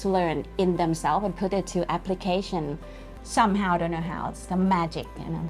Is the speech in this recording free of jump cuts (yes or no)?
no